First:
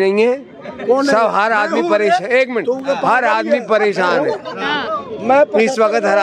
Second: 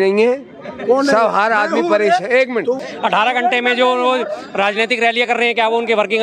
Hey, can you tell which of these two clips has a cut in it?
second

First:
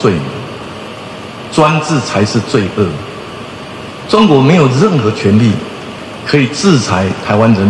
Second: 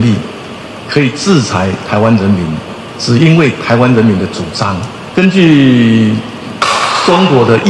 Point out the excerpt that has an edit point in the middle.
second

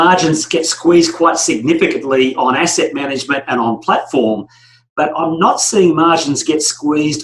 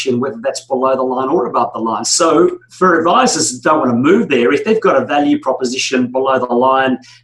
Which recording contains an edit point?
second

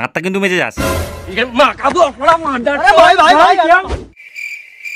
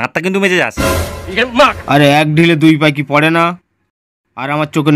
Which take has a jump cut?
second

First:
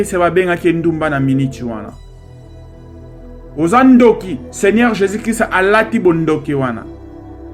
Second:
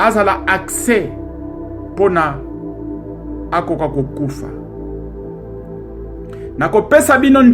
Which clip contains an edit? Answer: second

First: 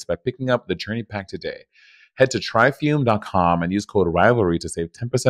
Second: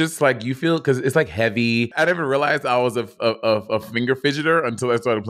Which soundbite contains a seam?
second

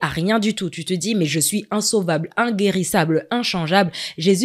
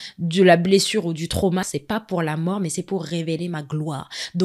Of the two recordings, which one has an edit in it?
second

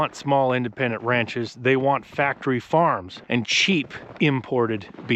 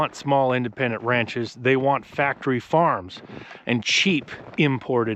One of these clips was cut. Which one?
first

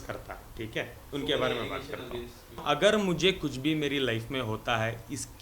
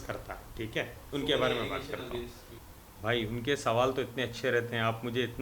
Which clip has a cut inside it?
first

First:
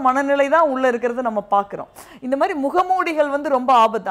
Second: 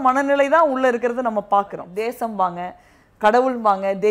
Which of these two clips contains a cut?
second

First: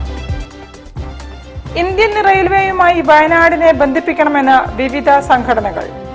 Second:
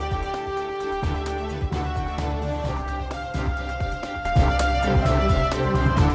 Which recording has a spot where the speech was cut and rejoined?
first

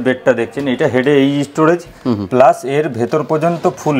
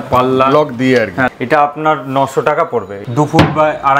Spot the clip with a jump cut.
second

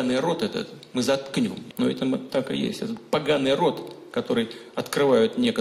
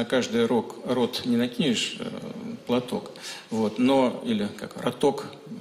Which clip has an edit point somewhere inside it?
first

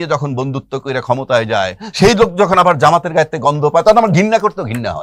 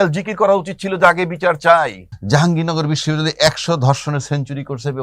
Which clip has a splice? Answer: second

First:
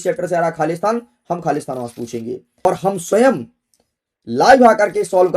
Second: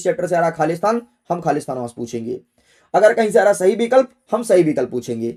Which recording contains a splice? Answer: first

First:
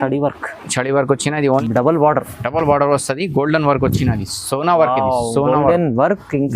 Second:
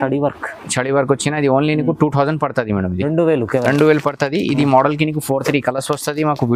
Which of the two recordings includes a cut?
first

